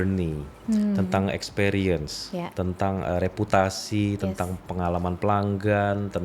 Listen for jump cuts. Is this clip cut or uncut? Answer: uncut